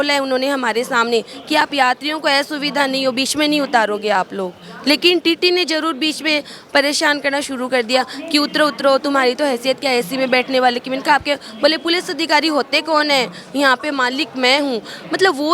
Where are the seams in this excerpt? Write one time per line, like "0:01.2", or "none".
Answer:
none